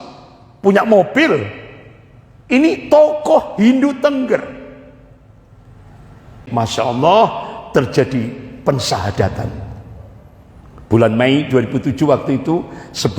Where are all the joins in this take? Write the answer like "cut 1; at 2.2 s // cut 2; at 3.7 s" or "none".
cut 1; at 6.4 s